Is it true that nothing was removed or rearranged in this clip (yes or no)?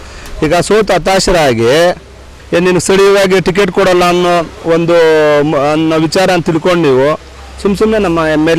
no